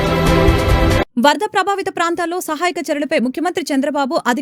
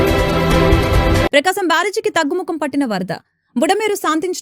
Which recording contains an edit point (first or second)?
second